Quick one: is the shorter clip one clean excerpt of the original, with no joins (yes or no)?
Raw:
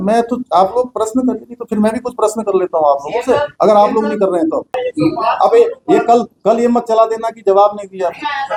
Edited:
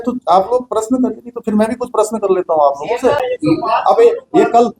no